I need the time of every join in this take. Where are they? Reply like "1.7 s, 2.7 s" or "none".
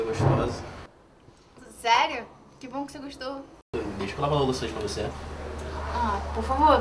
3.3 s